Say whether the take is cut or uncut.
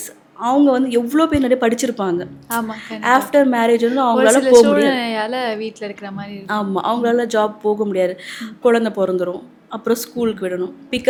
uncut